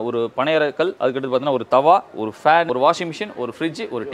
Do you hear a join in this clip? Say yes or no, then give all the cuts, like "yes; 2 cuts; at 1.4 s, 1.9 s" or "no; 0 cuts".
yes; 2 cuts; at 0.9 s, 2.7 s